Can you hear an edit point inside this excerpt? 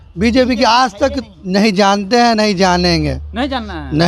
no; 0 cuts

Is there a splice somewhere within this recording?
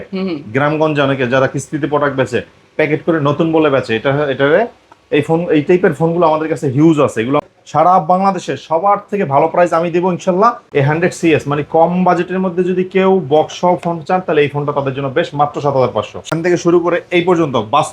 yes; 3 cuts; at 7.4 s, 10.6 s, 16.3 s

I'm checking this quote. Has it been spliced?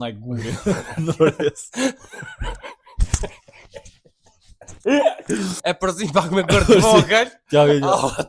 yes; 1 cut; at 5.5 s

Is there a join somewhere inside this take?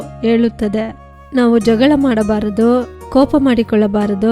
yes; 1 cut; at 3.0 s

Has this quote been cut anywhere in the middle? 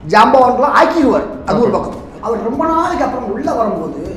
yes; 1 cut; at 2.1 s

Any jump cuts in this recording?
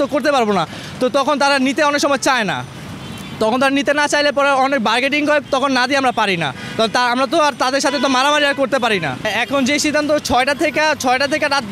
no; 0 cuts

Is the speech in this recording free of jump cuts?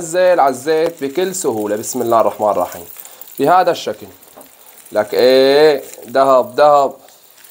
yes; 0 cuts

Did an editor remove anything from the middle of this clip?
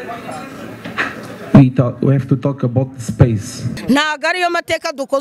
yes; 1 cut; at 3.8 s

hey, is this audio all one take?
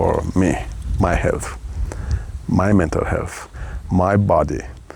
yes; 0 cuts

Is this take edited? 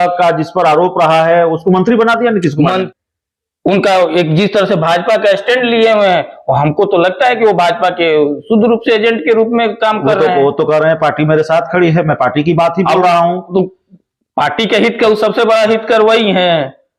yes; 1 cut; at 2.9 s

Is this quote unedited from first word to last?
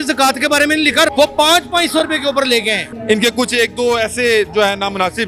no; 2 cuts; at 1.1 s, 2.9 s

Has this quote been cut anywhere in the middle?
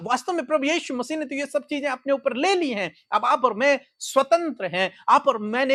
no; 0 cuts

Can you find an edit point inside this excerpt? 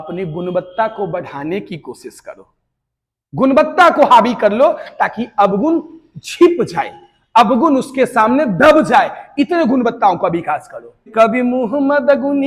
yes; 1 cut; at 11.0 s

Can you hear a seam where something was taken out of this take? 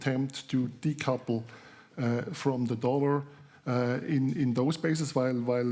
no; 0 cuts

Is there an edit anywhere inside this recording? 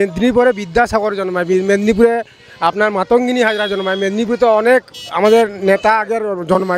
no; 0 cuts

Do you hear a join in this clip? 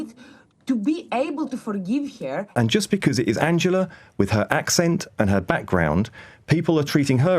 yes; 1 cut; at 2.5 s

